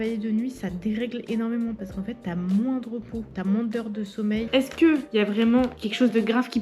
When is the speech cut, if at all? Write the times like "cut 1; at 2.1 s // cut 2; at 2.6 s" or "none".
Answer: cut 1; at 4.5 s